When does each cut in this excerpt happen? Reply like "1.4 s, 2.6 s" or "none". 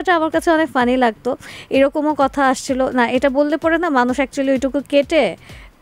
none

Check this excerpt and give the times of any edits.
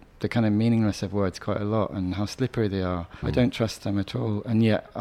3.2 s

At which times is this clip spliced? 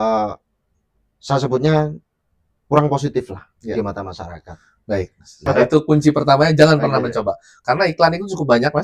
5.5 s

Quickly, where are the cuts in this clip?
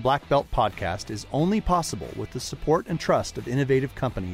none

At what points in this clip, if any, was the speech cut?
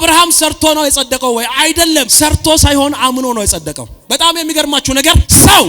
none

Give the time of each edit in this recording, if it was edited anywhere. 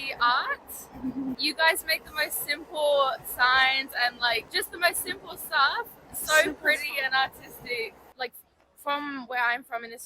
1.4 s, 4.5 s, 8.0 s

